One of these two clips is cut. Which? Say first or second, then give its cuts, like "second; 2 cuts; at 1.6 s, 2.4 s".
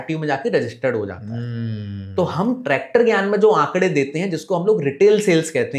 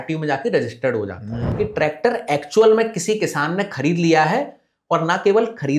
second; 1 cut; at 1.4 s